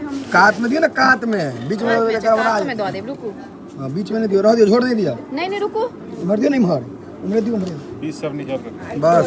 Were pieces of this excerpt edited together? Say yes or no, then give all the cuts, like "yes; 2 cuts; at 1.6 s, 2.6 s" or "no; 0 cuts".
no; 0 cuts